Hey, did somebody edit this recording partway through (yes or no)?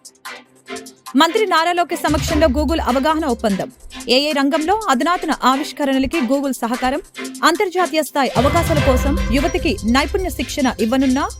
yes